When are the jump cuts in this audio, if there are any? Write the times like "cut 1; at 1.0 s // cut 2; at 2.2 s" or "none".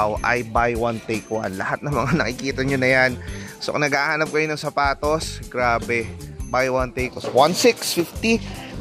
cut 1; at 7.1 s

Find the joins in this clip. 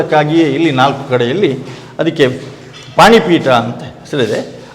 none

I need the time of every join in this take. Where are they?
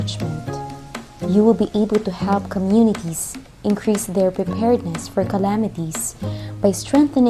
none

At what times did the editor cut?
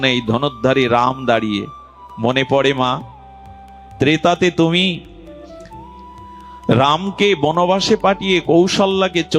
cut 1; at 5.2 s // cut 2; at 6.7 s

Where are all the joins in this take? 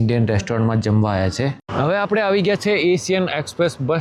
cut 1; at 1.6 s

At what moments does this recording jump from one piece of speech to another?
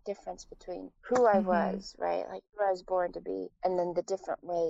cut 1; at 0.9 s // cut 2; at 2.4 s // cut 3; at 3.5 s

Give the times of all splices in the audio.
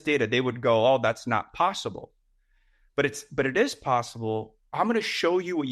cut 1; at 4.6 s

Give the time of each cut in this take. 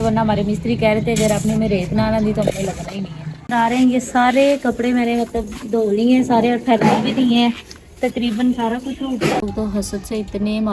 cut 1; at 3.5 s // cut 2; at 9.4 s

